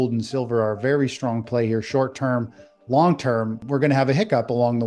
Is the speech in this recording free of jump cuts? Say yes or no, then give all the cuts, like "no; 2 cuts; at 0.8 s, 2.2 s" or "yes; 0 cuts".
no; 1 cut; at 3.6 s